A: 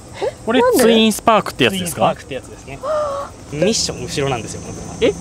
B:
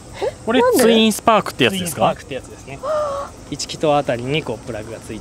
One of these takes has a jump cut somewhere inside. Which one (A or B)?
A